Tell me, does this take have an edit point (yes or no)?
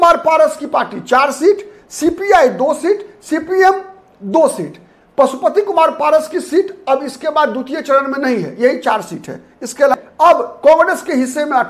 yes